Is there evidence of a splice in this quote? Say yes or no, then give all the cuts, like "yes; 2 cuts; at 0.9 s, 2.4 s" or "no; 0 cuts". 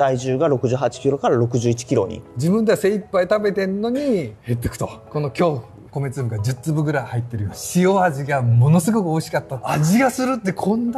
yes; 4 cuts; at 2.2 s, 5.8 s, 7.6 s, 9.5 s